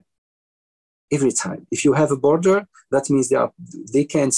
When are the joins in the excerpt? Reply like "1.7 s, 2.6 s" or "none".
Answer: none